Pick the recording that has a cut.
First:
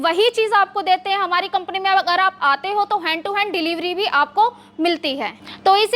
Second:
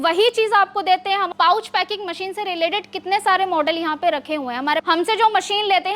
second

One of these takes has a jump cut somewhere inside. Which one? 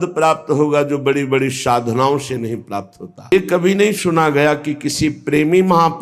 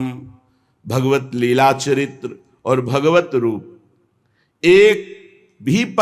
first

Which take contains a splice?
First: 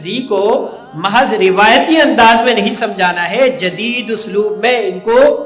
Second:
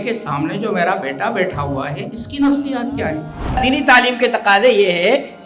second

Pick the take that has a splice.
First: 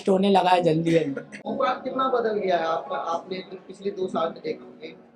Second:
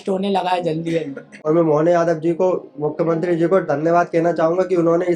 second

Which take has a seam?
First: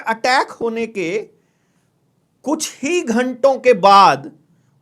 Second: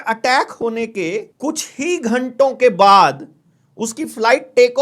second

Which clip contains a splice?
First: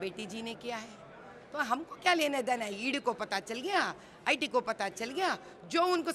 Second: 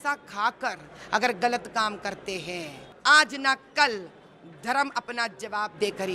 second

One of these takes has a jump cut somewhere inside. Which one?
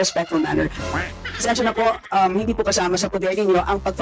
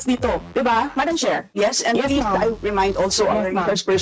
second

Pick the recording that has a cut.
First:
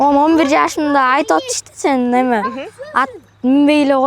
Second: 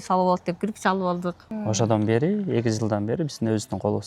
second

